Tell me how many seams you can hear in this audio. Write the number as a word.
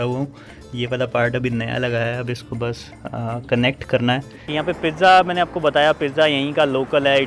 one